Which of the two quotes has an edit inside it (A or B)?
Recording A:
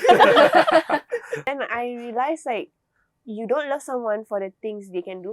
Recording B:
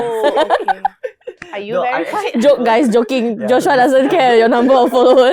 A